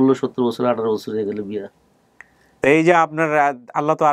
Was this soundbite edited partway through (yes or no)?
no